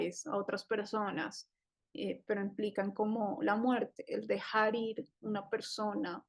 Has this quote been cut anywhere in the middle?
no; 0 cuts

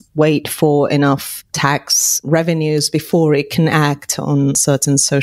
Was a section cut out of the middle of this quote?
no; 0 cuts

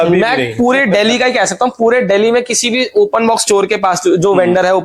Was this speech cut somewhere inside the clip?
no; 0 cuts

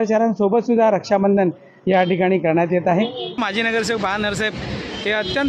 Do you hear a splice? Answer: yes; 1 cut; at 3.4 s

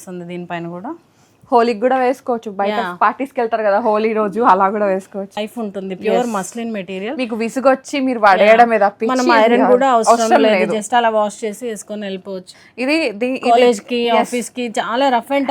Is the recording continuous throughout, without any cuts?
no; 2 cuts; at 5.5 s, 12.5 s

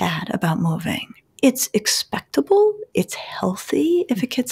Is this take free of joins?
no; 1 cut; at 1.2 s

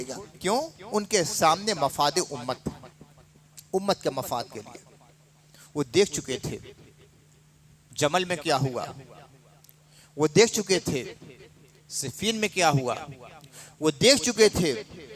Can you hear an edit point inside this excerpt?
no; 0 cuts

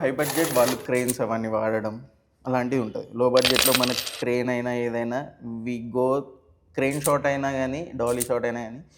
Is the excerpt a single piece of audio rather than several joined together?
yes; 0 cuts

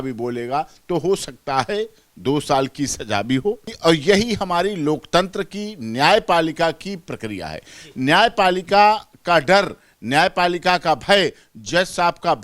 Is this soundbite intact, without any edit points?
no; 1 cut; at 3.7 s

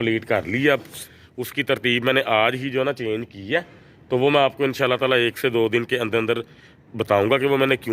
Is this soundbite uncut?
no; 1 cut; at 0.9 s

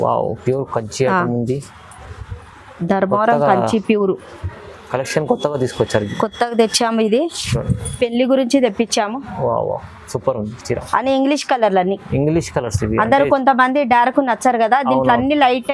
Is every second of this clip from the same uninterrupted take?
yes; 0 cuts

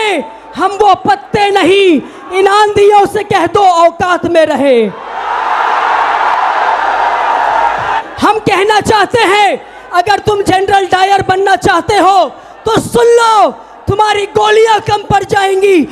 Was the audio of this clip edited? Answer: yes; 1 cut; at 8.0 s

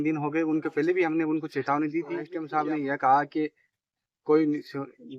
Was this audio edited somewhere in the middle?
yes; 1 cut; at 2.4 s

